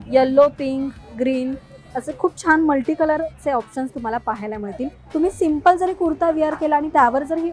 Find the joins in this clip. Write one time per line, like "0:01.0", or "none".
0:05.0